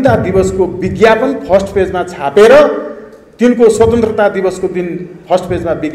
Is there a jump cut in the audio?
no; 0 cuts

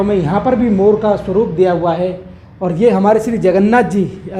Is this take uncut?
yes; 0 cuts

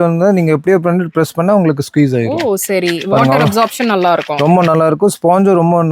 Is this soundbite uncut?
yes; 0 cuts

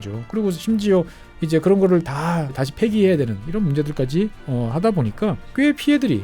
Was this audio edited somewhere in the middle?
yes; 3 cuts; at 2.6 s, 4.4 s, 5.4 s

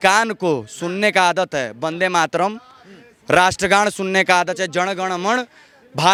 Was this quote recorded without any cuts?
yes; 0 cuts

